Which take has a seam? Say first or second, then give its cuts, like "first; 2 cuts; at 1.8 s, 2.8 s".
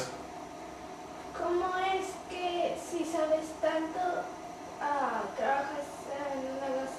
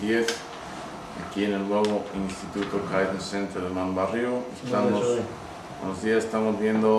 first; 1 cut; at 2.9 s